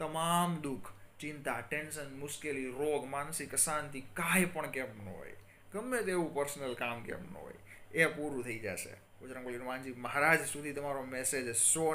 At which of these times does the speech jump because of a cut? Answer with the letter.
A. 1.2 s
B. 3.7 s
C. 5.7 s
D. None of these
D